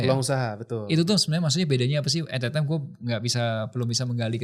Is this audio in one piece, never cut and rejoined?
yes; 0 cuts

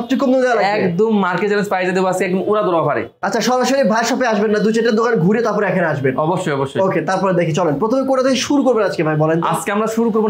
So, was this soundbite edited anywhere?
no; 0 cuts

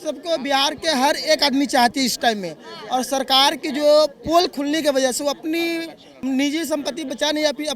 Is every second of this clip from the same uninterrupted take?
yes; 0 cuts

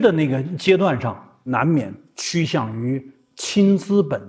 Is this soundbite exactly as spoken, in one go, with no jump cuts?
no; 1 cut; at 1.3 s

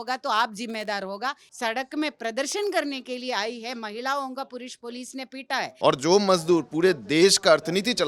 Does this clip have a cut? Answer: yes; 2 cuts; at 1.5 s, 5.7 s

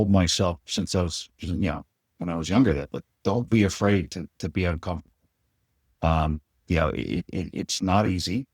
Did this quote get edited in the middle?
no; 0 cuts

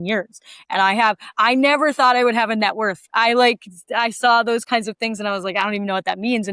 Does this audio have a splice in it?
no; 0 cuts

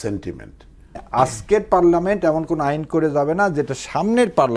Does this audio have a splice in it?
yes; 1 cut; at 1.0 s

